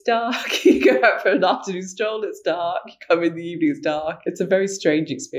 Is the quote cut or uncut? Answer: cut